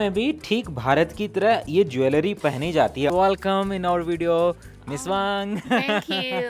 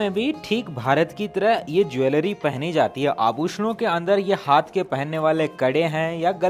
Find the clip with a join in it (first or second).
first